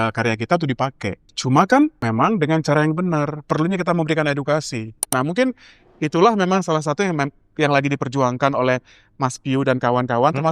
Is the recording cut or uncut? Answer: cut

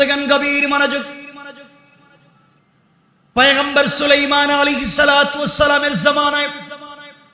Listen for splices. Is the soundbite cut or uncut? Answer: cut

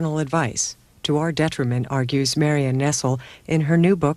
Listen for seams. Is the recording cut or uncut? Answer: uncut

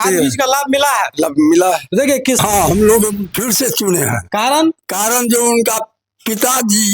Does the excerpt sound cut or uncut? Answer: cut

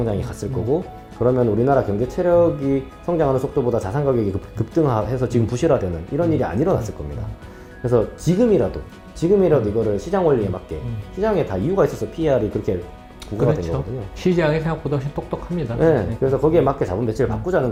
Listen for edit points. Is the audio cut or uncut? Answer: uncut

